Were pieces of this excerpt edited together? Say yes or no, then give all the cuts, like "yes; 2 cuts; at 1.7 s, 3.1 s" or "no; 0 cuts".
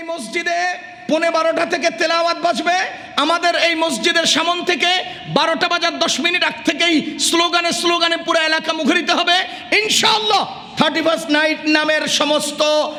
no; 0 cuts